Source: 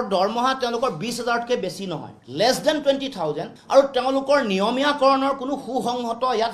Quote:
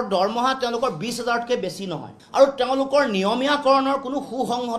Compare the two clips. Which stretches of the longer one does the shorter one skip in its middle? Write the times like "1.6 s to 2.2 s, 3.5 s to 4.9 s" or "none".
2.2 s to 3.5 s